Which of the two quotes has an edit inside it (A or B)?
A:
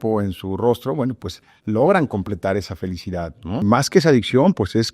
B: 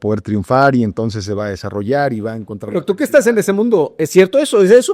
A